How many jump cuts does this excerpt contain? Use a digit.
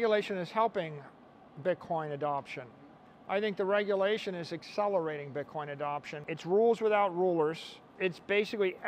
2